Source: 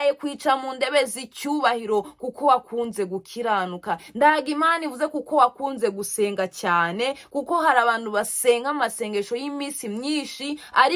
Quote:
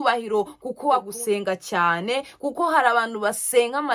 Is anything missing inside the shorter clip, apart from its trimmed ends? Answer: yes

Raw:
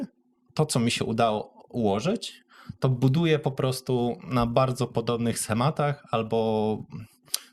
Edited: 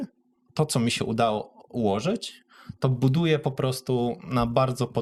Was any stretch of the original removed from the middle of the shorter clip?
no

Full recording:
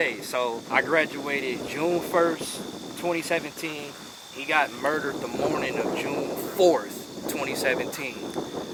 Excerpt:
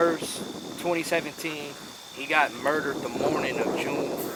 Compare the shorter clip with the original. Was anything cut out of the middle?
no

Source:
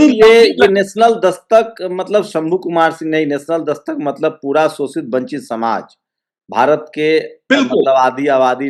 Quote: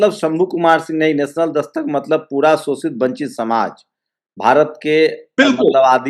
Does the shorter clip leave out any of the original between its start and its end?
no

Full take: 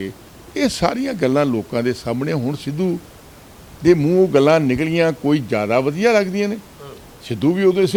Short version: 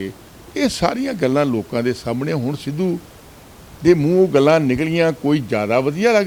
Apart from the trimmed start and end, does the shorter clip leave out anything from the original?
no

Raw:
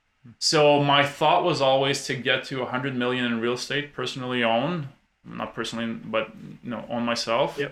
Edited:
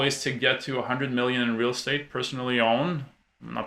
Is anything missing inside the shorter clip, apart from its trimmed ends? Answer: no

